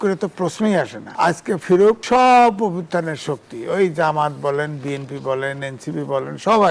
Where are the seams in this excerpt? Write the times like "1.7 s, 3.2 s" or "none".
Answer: 1.0 s, 2.0 s